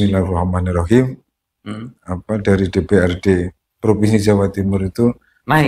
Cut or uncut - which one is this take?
uncut